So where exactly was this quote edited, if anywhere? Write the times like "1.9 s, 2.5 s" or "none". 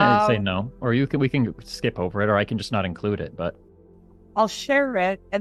none